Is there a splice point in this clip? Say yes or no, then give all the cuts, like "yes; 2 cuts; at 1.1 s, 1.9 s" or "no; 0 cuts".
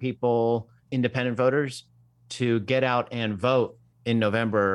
no; 0 cuts